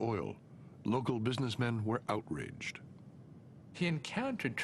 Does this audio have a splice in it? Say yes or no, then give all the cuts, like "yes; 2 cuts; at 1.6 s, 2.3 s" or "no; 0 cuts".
no; 0 cuts